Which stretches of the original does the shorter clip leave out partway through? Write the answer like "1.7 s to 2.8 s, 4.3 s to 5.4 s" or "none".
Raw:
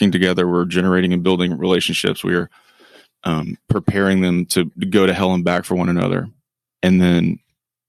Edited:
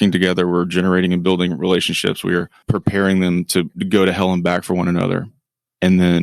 2.6 s to 3.6 s